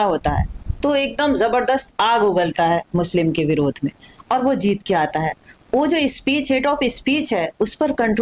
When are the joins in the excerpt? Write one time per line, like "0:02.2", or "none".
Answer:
none